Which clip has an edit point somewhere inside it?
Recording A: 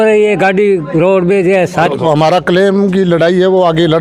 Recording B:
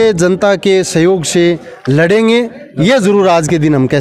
A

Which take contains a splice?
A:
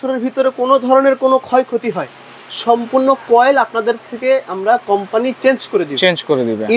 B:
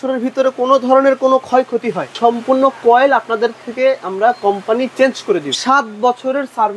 B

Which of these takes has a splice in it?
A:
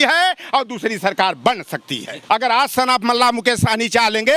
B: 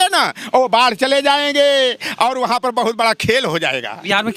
A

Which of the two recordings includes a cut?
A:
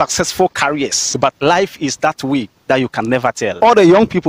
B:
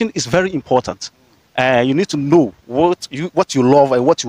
A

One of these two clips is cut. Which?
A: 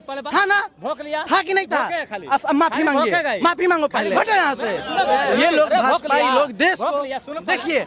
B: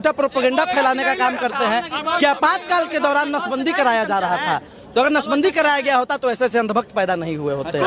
A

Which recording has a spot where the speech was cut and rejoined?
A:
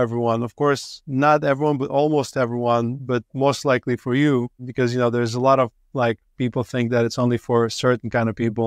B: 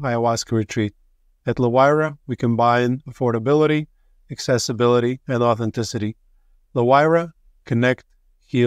A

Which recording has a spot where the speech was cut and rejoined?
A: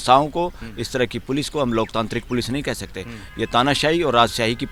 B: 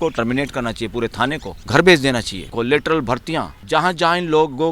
B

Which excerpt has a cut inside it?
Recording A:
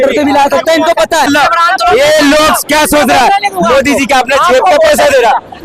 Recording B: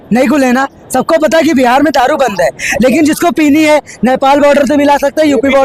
A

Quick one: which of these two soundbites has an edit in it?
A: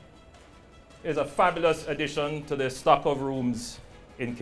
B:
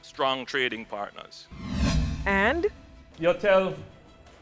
B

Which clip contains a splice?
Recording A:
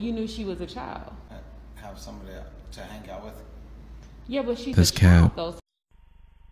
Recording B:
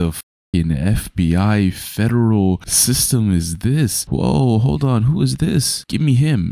A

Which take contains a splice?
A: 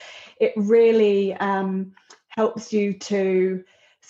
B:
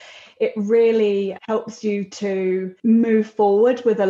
B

